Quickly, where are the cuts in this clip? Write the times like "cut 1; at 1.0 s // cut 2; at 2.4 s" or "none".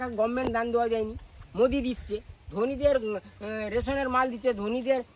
none